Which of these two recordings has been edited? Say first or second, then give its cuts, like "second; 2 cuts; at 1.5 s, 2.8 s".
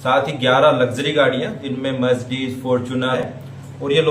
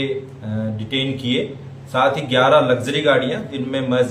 first; 1 cut; at 3.2 s